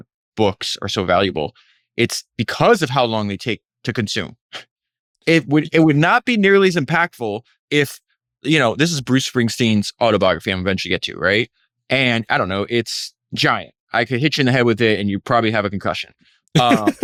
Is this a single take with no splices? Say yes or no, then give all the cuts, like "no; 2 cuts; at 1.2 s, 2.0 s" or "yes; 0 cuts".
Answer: yes; 0 cuts